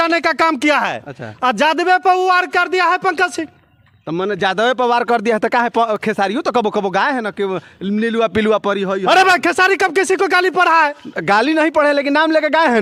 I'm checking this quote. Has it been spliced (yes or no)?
no